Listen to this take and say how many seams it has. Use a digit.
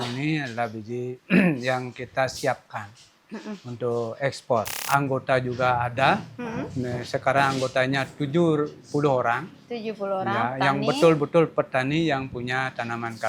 1